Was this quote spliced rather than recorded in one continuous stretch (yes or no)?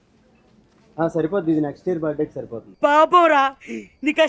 no